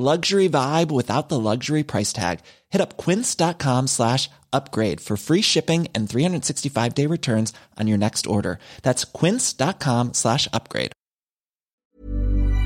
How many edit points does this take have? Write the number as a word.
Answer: one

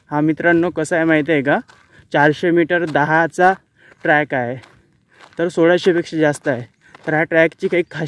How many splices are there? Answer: zero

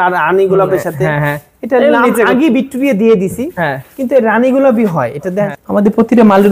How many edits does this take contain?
one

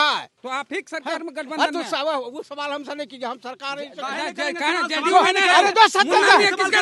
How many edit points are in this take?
zero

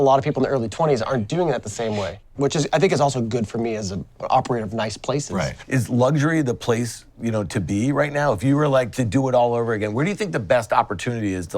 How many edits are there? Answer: four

